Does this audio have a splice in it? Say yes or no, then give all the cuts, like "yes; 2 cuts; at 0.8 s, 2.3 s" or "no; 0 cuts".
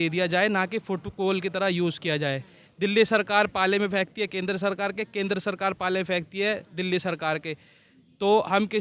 no; 0 cuts